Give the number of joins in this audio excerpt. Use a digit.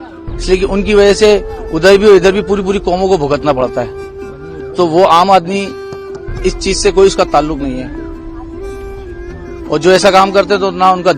2